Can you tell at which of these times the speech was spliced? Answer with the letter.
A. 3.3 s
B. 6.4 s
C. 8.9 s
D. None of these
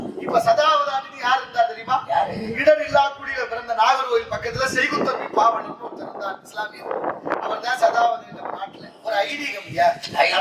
C